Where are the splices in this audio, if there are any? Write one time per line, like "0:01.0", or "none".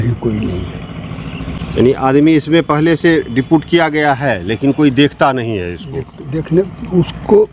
none